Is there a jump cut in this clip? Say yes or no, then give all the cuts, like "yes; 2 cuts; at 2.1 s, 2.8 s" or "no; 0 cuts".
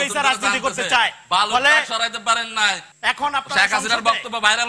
yes; 1 cut; at 2.9 s